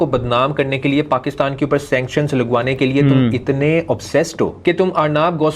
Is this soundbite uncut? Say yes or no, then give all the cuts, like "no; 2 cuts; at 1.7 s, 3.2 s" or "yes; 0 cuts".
yes; 0 cuts